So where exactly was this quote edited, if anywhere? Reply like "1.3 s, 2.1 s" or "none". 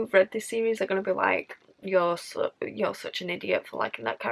none